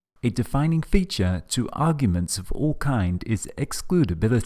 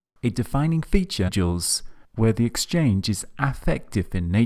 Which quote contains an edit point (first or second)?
first